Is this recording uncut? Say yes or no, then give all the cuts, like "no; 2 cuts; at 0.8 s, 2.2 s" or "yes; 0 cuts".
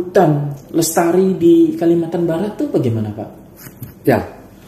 yes; 0 cuts